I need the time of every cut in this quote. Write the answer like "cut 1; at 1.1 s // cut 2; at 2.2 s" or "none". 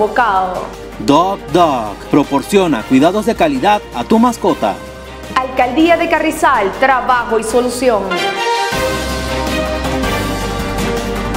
cut 1; at 8.1 s